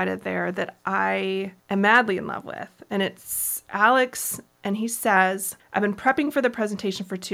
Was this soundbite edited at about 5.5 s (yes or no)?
yes